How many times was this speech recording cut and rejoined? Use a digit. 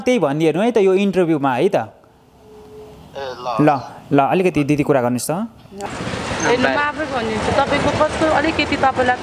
1